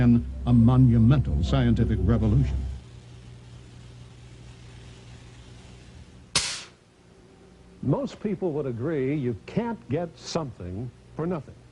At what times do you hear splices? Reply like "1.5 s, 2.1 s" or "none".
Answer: 10.5 s